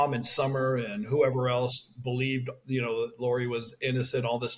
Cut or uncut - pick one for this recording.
uncut